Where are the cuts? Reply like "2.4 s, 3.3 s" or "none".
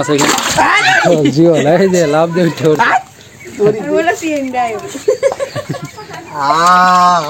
none